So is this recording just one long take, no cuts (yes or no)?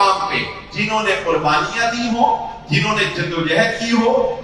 yes